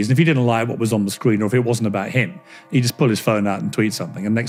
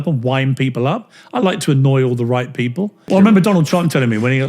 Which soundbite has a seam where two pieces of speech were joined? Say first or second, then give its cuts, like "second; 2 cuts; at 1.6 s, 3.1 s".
second; 1 cut; at 3.1 s